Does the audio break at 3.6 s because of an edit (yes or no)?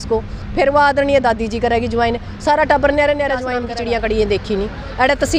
yes